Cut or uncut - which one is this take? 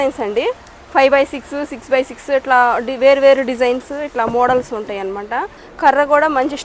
cut